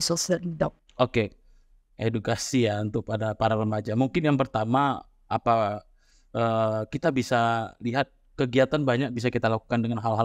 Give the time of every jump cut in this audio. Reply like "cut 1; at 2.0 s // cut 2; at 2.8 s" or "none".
none